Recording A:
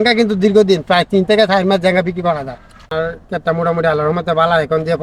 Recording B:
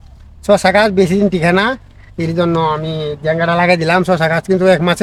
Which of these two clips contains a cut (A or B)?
A